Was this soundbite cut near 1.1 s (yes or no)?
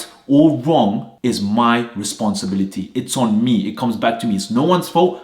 yes